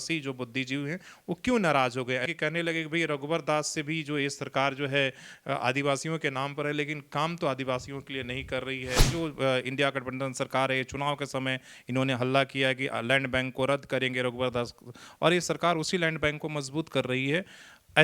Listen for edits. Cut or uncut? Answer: cut